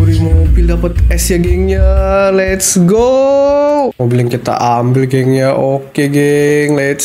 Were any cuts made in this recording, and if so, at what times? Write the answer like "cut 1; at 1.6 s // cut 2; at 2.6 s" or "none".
cut 1; at 4.0 s